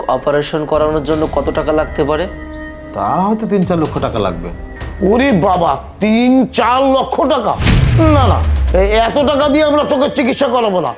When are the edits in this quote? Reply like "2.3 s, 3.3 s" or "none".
none

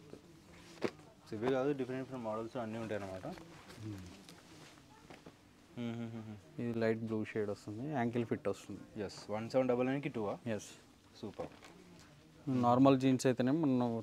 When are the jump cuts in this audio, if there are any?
none

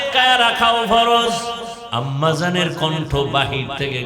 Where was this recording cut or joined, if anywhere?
1.7 s

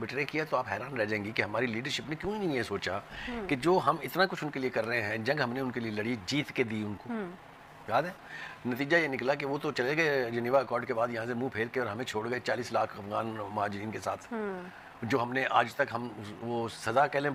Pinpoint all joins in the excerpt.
none

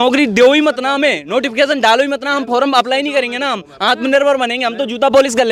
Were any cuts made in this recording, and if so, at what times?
none

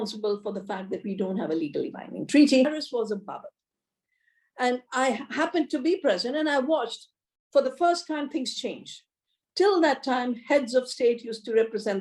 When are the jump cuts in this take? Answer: 2.8 s

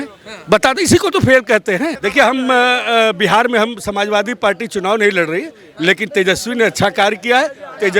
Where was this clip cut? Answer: 2.0 s

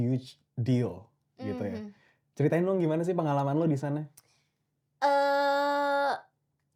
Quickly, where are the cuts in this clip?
none

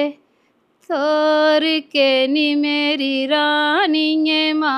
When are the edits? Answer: none

